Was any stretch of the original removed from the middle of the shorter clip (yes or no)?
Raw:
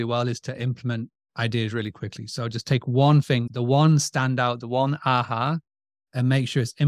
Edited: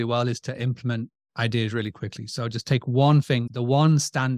no